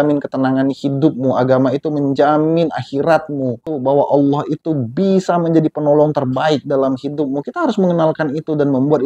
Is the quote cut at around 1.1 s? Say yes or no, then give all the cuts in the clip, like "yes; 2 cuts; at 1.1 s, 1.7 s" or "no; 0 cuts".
no; 1 cut; at 3.7 s